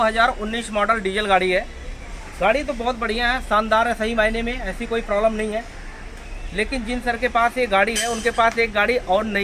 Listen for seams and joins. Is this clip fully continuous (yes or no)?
yes